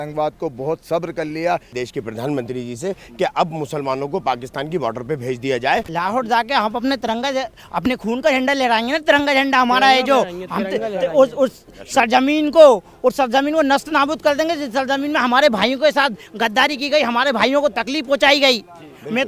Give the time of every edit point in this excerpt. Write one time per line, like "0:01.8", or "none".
0:01.7
0:05.9